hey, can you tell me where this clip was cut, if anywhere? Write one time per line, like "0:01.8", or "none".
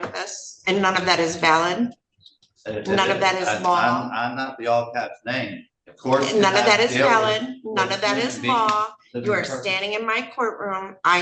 none